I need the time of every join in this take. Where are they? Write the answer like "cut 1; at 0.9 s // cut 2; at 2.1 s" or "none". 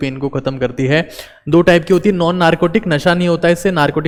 none